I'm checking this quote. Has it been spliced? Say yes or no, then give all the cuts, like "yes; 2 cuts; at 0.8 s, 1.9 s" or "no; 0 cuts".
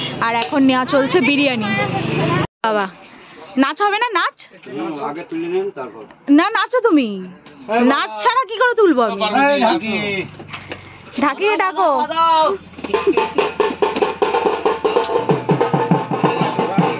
yes; 1 cut; at 2.5 s